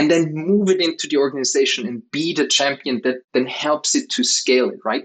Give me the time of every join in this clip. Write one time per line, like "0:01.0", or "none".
0:03.2